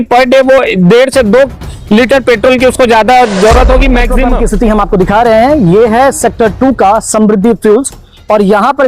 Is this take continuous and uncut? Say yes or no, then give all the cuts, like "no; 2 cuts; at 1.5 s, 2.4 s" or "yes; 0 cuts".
no; 1 cut; at 4.2 s